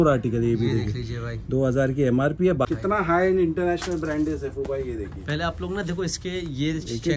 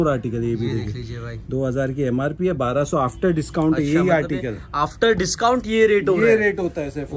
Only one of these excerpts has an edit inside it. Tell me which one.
first; 1 cut; at 2.7 s

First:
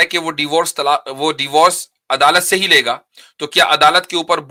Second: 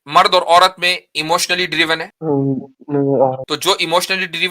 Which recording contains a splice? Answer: second; 2 cuts; at 2.1 s, 3.5 s

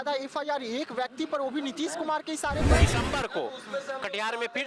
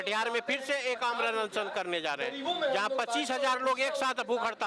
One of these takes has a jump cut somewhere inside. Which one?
first; 1 cut; at 2.8 s

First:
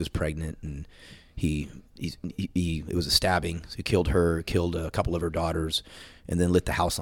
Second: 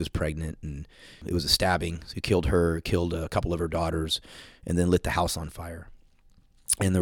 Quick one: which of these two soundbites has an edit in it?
second; 1 cut; at 1.2 s

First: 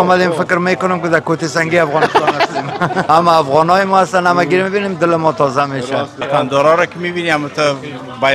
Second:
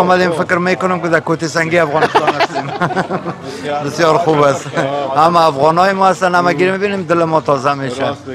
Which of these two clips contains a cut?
first; 2 cuts; at 3.1 s, 6.2 s

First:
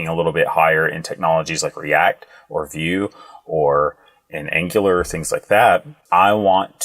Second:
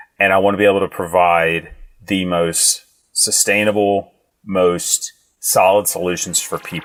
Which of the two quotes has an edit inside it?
first; 1 cut; at 5.9 s

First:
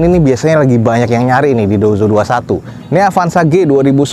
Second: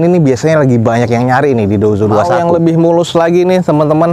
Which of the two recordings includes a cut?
second; 1 cut; at 2.3 s

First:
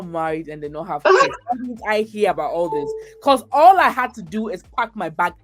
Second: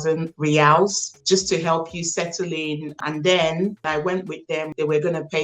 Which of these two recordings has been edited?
second; 2 cuts; at 3.0 s, 4.2 s

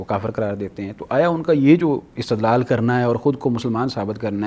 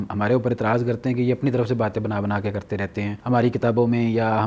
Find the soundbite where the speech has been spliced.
second; 1 cut; at 3.2 s

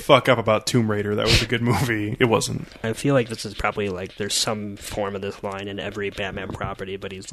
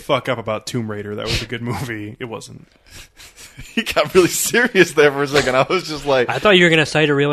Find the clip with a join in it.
first; 1 cut; at 2.8 s

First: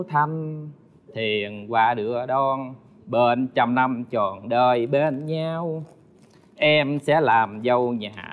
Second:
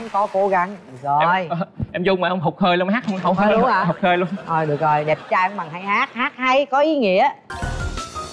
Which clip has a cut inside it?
second; 1 cut; at 7.4 s

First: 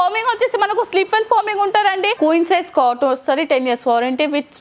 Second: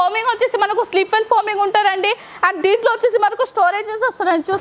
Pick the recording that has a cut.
first; 1 cut; at 2.1 s

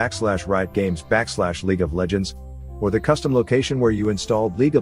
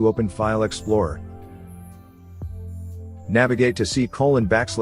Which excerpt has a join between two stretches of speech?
second; 2 cuts; at 1.1 s, 3.2 s

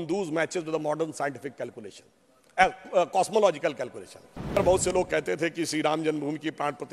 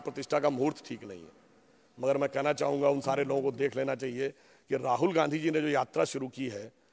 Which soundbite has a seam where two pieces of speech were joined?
first; 1 cut; at 4.6 s

